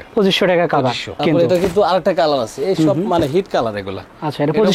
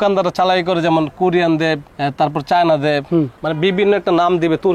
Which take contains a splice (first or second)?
first